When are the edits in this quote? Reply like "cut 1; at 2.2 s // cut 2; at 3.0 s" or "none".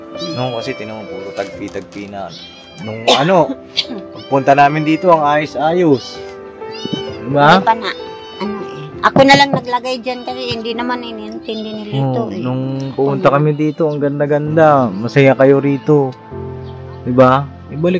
none